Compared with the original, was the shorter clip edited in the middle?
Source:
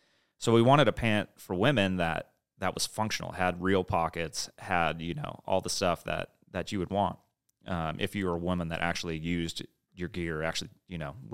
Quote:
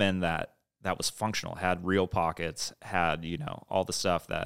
no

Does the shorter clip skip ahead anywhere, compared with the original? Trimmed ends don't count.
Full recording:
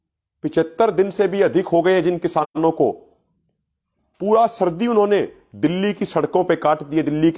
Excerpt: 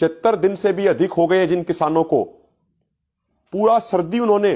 yes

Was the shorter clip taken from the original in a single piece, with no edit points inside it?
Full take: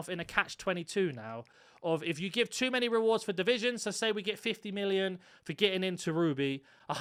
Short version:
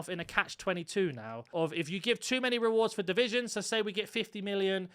no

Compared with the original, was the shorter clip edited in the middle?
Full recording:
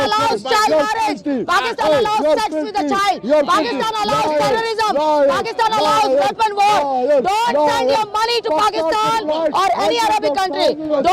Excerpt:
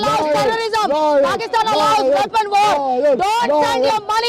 no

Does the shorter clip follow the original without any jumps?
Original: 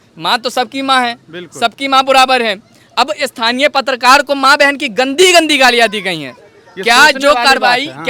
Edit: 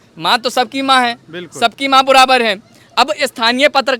yes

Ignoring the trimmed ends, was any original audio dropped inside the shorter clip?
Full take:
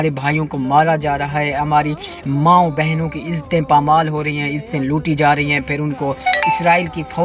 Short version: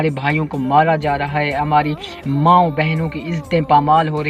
no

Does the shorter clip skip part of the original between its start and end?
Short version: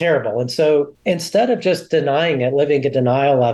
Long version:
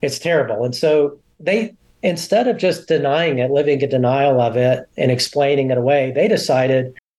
yes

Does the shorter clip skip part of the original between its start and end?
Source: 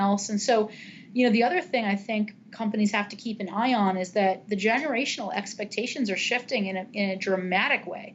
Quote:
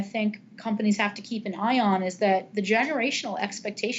no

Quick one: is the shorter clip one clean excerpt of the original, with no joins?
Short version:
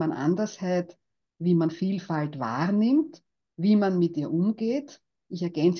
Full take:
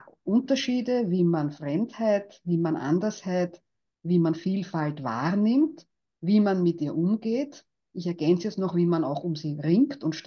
yes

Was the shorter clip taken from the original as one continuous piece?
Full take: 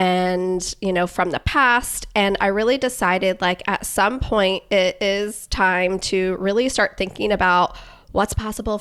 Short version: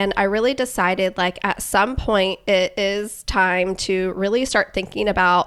yes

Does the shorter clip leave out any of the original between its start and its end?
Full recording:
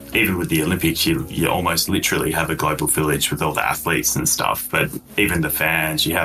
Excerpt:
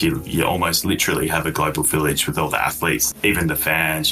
yes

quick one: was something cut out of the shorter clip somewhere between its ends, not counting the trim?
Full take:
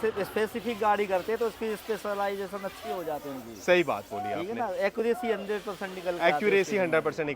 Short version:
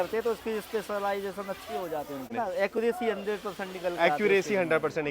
yes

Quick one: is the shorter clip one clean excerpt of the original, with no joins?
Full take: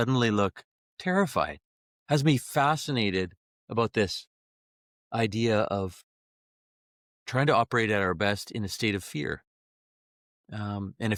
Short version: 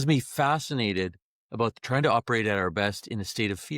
no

